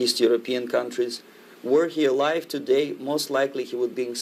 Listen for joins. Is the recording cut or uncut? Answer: uncut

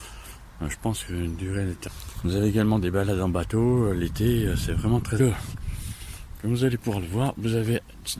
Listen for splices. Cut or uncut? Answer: cut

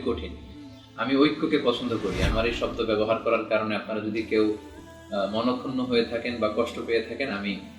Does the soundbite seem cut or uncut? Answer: cut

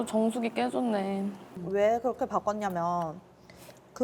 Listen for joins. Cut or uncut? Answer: cut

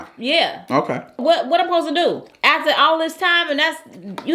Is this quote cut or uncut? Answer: cut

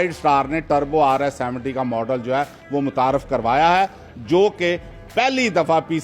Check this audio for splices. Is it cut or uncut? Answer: uncut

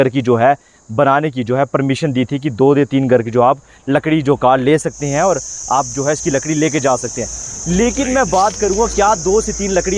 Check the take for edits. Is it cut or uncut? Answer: uncut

